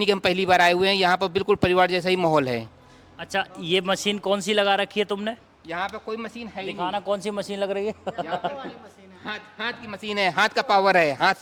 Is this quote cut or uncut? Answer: uncut